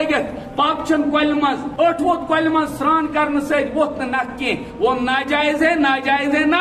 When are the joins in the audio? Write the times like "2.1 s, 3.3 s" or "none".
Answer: 1.7 s